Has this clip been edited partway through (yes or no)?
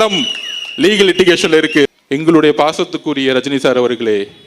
yes